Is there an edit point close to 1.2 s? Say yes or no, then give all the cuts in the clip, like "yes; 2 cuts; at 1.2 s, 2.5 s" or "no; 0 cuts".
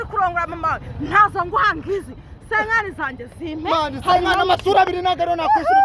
no; 0 cuts